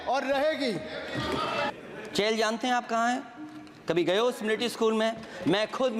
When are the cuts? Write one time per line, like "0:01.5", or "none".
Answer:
0:01.7